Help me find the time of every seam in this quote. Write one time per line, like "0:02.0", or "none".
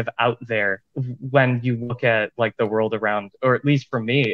none